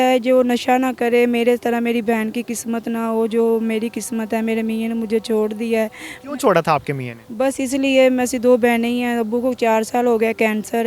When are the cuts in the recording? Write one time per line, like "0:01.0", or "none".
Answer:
none

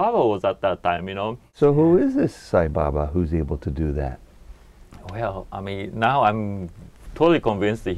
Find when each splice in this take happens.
0:01.4

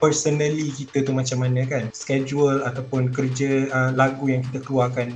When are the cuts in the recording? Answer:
0:02.0

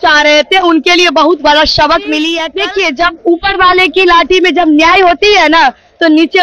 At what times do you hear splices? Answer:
0:02.4

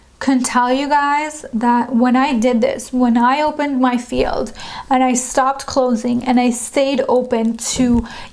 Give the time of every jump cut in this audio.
none

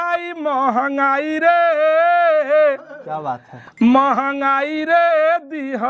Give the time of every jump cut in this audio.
none

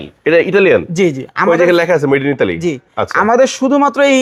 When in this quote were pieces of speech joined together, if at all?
none

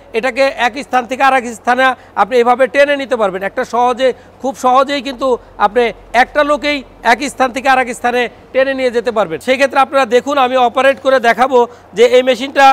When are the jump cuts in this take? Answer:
0:09.4

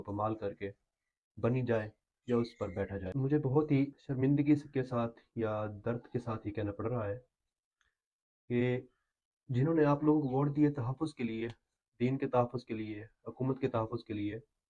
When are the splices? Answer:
0:03.0
0:04.0

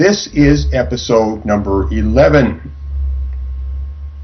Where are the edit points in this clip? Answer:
none

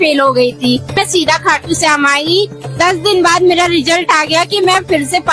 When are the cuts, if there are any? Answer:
0:01.0
0:02.6

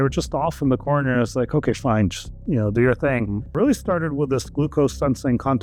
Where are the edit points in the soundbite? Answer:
none

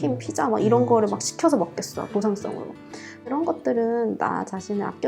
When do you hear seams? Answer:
0:03.3

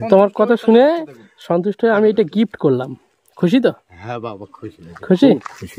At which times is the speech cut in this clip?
none

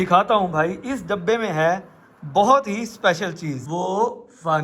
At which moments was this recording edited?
0:03.6

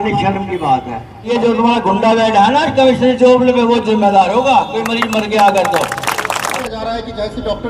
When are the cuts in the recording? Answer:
0:01.3
0:06.5

